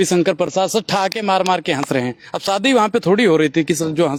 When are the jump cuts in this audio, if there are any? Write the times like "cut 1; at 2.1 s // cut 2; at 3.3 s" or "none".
none